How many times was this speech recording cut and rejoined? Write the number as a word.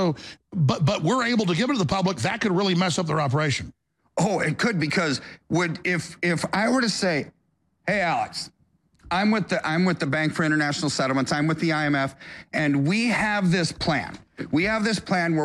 zero